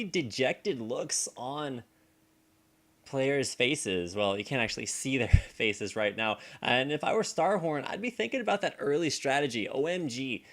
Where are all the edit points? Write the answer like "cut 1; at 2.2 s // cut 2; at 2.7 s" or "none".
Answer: cut 1; at 2.7 s